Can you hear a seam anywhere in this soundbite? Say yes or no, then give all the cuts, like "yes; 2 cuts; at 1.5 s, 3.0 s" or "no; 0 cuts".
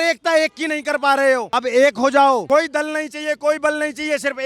yes; 2 cuts; at 1.5 s, 2.4 s